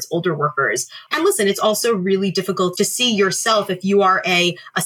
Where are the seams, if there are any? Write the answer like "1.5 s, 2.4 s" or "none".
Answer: 1.0 s, 2.7 s